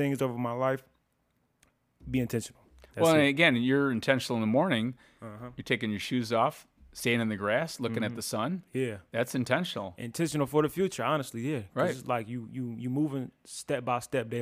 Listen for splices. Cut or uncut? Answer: uncut